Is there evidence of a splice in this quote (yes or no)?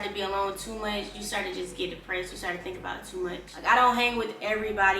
yes